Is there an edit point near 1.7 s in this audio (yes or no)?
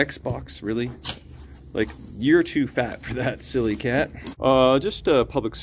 no